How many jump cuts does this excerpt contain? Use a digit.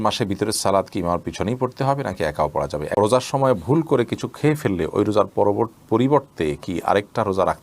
1